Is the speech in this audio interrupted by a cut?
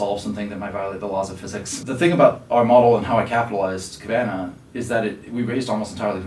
yes; 1 cut; at 1.7 s

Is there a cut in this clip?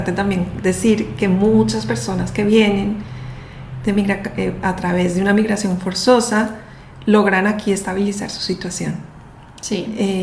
no; 0 cuts

